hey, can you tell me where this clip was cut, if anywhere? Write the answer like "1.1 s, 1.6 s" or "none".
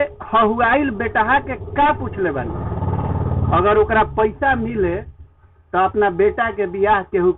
none